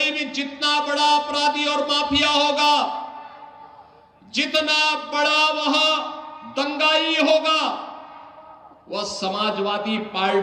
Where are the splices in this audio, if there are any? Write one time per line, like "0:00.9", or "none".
none

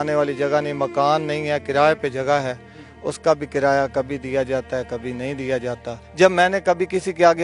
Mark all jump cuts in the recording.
0:06.0

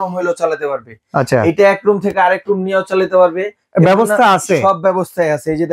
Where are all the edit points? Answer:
none

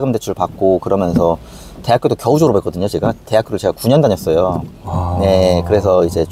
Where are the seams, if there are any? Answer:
none

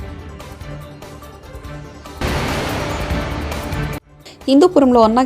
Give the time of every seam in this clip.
0:01.1
0:02.2
0:04.1

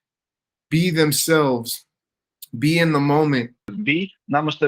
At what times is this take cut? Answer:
0:03.7

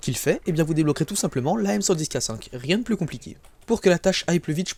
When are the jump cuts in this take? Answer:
none

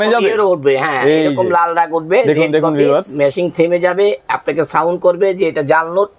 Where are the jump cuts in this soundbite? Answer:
none

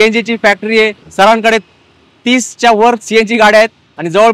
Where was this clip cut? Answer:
0:01.0

